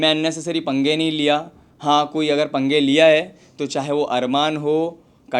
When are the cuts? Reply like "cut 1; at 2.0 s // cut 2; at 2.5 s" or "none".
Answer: none

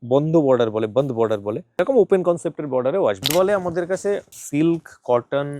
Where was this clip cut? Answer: cut 1; at 1.8 s // cut 2; at 3.3 s // cut 3; at 4.4 s

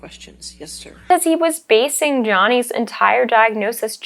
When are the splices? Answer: cut 1; at 1.1 s

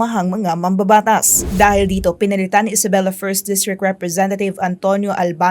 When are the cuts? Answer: cut 1; at 1.4 s

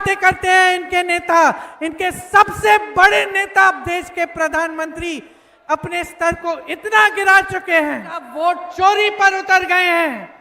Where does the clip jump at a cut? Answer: cut 1; at 8.3 s

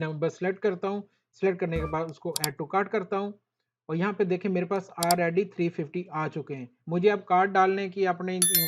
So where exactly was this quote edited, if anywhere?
none

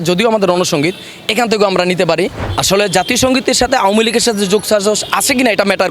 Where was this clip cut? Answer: cut 1; at 2.5 s

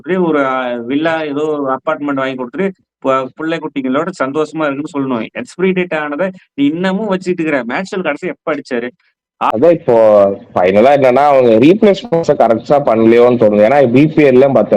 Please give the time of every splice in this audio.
cut 1; at 9.5 s

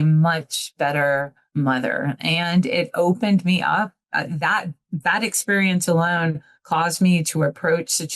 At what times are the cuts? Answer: cut 1; at 1.4 s

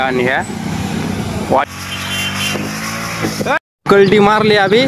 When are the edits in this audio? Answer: cut 1; at 1.7 s // cut 2; at 3.6 s

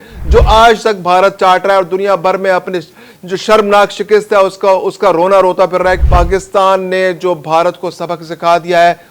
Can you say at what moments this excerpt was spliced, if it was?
cut 1; at 6.0 s

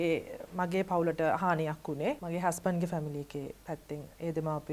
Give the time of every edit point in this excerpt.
cut 1; at 2.2 s

